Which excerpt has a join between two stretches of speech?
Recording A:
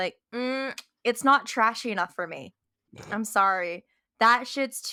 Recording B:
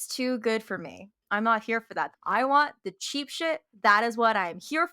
B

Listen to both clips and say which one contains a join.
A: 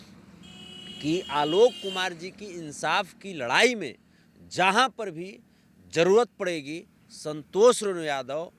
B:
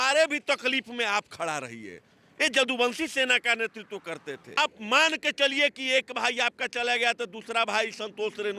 B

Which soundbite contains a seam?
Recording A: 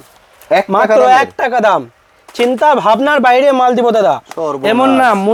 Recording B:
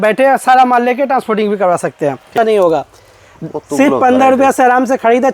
B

